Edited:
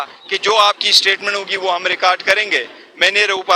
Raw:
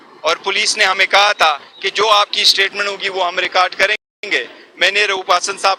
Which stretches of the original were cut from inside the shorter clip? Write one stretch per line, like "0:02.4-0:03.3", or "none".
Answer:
0:04.0-0:04.3